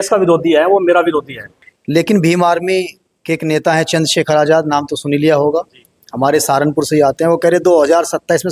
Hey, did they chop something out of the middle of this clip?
yes; 1 cut; at 1.3 s

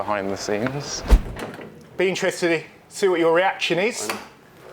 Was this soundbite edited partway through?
yes; 1 cut; at 1.0 s

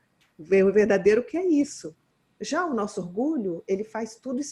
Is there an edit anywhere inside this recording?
no; 0 cuts

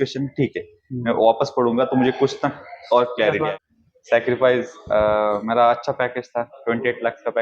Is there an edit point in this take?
yes; 1 cut; at 3.5 s

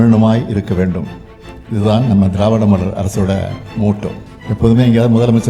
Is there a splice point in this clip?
yes; 1 cut; at 4.3 s

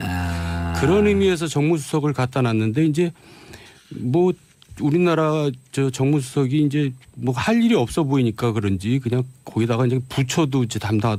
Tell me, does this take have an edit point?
no; 0 cuts

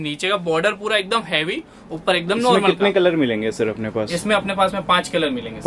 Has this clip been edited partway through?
no; 0 cuts

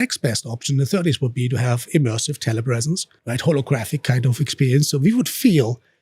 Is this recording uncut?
no; 1 cut; at 3.1 s

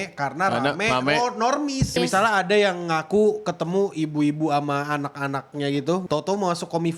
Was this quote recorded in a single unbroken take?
no; 2 cuts; at 2.0 s, 6.0 s

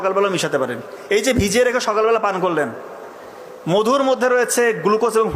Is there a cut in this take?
no; 0 cuts

